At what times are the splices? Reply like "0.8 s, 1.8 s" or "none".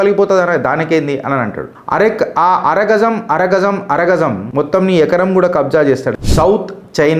4.4 s, 6.1 s